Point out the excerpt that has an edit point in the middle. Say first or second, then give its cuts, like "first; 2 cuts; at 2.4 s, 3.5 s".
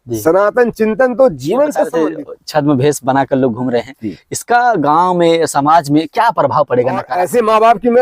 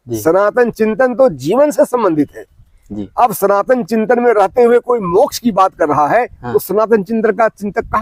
first; 2 cuts; at 1.9 s, 7.1 s